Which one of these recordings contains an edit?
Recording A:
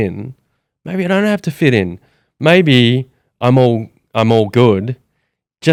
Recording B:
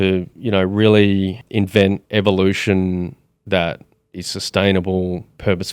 B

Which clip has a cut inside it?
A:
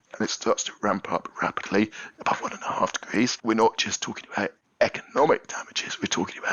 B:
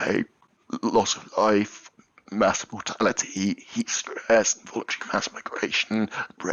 A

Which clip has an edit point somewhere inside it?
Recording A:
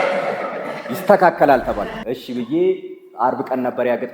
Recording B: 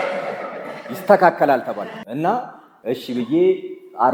A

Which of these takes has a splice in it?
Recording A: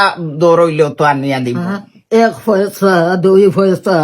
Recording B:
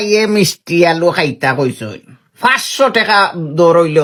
A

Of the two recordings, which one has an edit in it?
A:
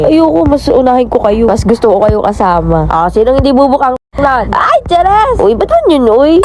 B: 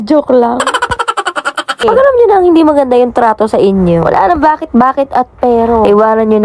B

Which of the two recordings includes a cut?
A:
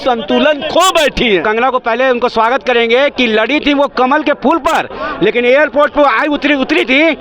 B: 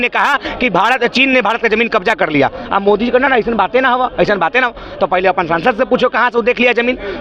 A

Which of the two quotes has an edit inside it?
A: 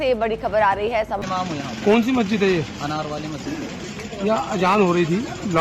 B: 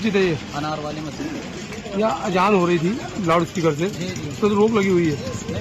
A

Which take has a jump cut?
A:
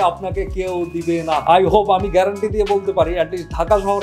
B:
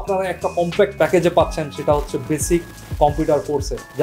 A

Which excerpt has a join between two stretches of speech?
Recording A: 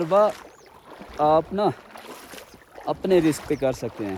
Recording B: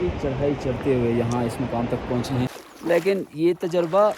B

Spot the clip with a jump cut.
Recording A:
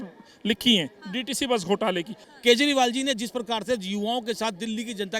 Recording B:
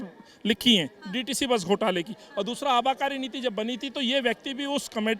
A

